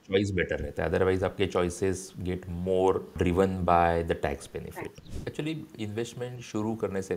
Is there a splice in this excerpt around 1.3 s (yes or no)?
no